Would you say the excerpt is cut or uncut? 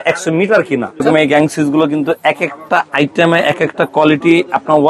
cut